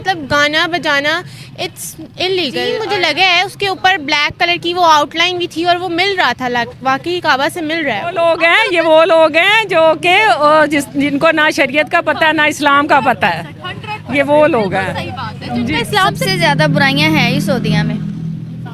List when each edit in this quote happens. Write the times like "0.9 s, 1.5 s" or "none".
2.8 s, 8.1 s, 16.2 s